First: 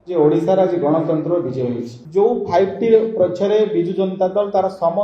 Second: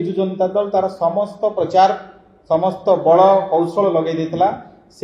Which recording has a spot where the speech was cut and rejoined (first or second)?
first